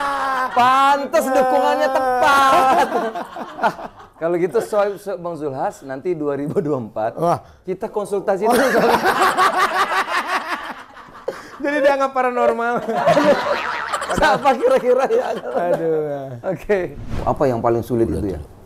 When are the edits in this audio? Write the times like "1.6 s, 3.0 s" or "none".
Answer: 17.2 s